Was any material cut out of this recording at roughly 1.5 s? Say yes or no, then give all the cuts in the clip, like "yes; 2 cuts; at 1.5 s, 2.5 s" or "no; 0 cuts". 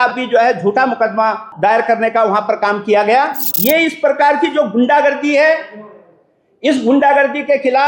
yes; 2 cuts; at 1.5 s, 3.5 s